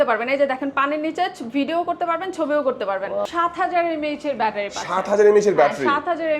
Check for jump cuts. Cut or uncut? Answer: cut